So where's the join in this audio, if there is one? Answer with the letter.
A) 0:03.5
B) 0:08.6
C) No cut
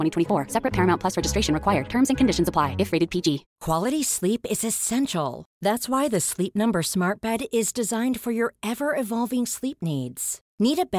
A